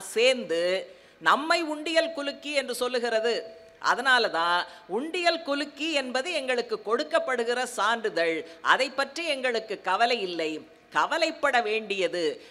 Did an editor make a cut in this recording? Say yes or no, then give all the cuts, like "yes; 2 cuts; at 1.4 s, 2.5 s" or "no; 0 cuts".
no; 0 cuts